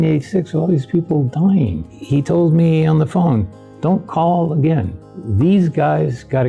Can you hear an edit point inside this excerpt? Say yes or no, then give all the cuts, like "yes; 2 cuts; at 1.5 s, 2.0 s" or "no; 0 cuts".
yes; 1 cut; at 1.9 s